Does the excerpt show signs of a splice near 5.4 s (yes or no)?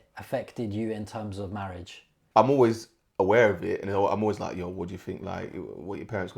no